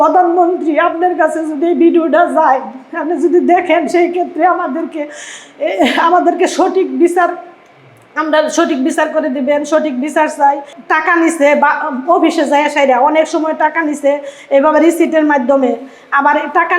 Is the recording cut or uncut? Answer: cut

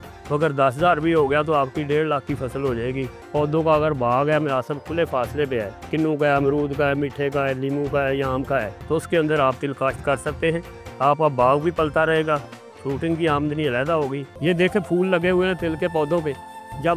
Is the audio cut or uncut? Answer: cut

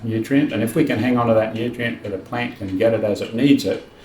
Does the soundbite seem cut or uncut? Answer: cut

